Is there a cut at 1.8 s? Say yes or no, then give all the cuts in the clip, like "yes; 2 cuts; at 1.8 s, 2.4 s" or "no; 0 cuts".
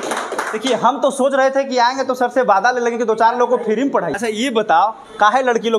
no; 1 cut; at 4.1 s